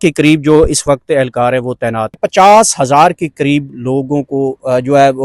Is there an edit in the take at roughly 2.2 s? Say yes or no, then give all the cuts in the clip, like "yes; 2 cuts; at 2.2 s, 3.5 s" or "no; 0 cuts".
yes; 1 cut; at 2.2 s